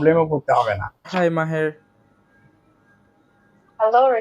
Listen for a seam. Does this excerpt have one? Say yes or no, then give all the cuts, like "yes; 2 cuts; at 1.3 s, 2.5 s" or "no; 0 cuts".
yes; 1 cut; at 1.0 s